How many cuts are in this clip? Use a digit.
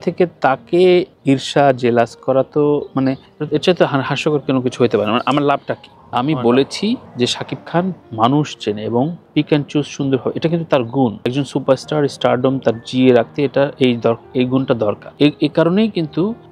1